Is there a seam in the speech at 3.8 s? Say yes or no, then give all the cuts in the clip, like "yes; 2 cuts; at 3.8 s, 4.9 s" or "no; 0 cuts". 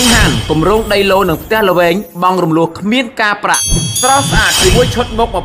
yes; 1 cut; at 3.8 s